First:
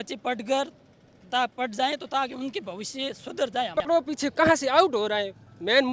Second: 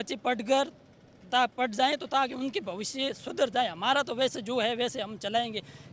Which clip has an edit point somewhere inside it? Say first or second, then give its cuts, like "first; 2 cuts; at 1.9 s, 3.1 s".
first; 1 cut; at 3.7 s